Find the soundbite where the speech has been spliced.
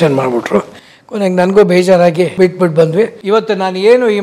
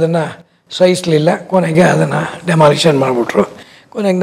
first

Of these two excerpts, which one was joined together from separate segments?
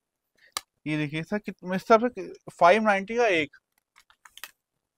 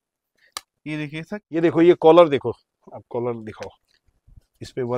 second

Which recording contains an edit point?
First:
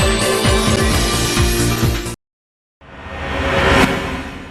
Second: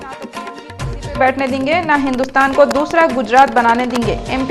first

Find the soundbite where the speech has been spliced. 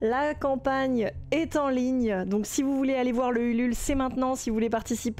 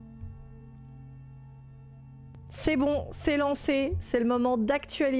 second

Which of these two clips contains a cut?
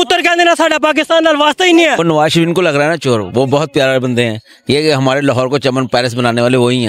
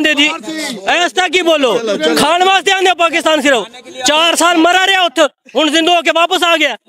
first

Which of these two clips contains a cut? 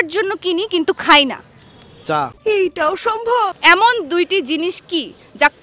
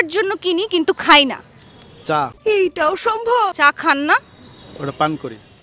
first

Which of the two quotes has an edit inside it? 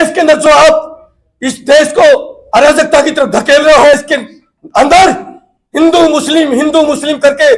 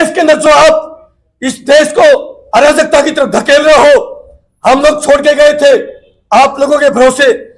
first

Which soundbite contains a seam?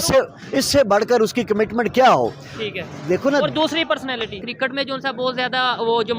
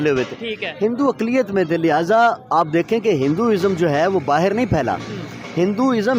first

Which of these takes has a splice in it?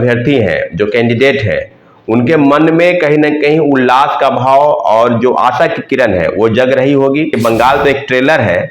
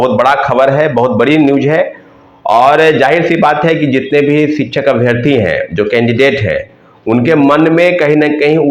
first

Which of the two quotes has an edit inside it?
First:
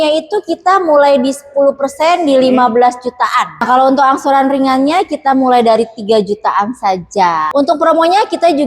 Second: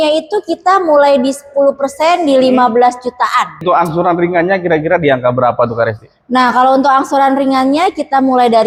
first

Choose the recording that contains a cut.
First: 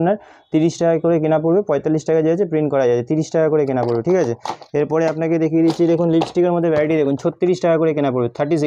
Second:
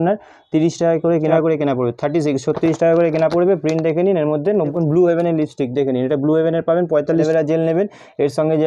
second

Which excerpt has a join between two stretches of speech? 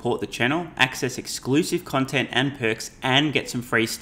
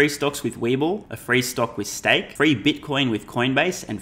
second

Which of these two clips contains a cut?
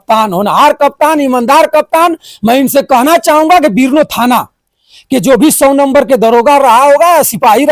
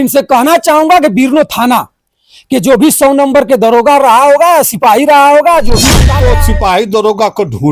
second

